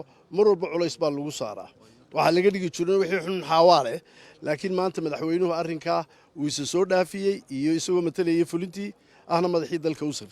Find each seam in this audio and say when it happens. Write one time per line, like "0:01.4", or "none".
0:09.4